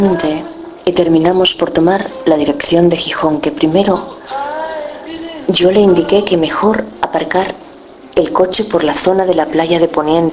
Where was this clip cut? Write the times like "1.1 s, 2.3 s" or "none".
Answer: 3.1 s